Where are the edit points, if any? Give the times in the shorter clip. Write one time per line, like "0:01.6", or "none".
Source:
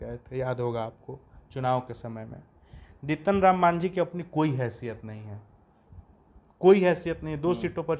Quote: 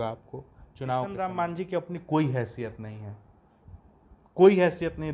0:01.1